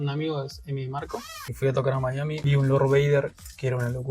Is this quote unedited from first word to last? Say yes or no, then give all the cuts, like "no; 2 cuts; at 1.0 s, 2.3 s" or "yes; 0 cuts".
no; 2 cuts; at 1.4 s, 2.4 s